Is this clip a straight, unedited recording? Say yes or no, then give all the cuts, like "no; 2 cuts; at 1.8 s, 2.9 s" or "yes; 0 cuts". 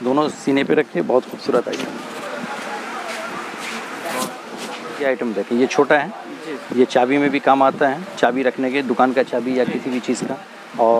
yes; 0 cuts